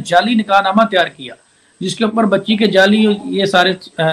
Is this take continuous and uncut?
yes; 0 cuts

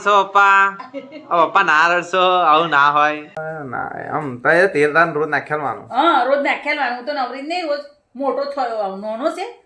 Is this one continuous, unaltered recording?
no; 1 cut; at 3.4 s

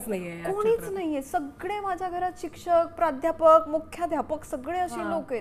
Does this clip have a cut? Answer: no; 0 cuts

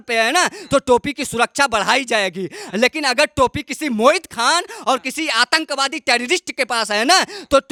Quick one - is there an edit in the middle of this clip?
no; 0 cuts

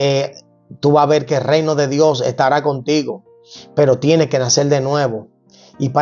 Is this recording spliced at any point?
no; 0 cuts

